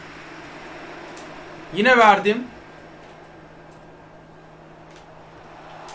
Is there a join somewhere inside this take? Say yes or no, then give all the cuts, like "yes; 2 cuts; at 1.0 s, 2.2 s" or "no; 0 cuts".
no; 0 cuts